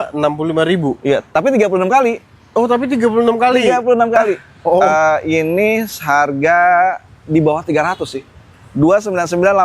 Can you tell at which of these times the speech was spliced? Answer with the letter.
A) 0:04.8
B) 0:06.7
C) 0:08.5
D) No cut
A